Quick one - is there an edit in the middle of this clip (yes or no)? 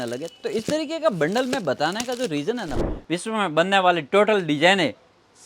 yes